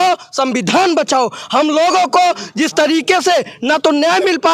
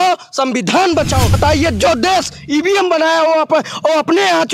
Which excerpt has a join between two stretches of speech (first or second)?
second